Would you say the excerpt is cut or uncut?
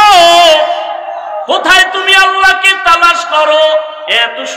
uncut